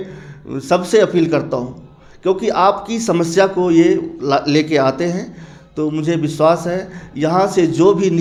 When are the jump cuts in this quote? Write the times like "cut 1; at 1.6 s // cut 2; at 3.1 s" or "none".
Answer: none

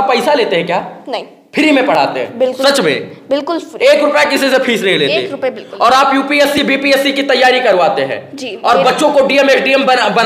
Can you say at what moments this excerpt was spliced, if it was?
none

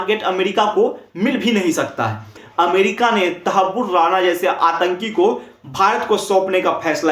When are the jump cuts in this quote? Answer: cut 1; at 2.4 s

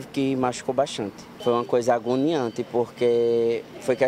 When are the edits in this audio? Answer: cut 1; at 1.3 s

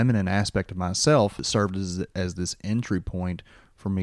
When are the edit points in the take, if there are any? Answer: cut 1; at 1.5 s

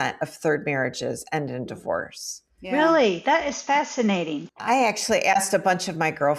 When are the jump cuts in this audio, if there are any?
cut 1; at 4.6 s

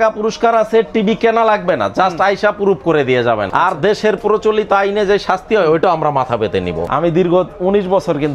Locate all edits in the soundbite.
cut 1; at 3.5 s // cut 2; at 6.9 s

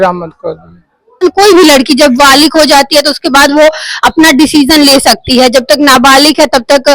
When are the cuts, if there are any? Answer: cut 1; at 1.2 s

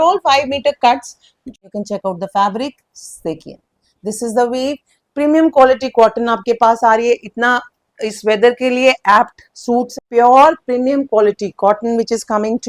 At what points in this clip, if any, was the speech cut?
cut 1; at 1.5 s // cut 2; at 9.9 s

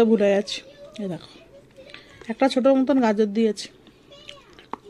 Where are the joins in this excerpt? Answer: none

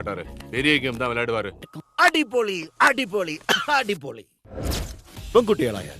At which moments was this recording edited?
cut 1; at 1.8 s

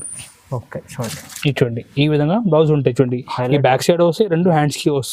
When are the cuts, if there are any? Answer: none

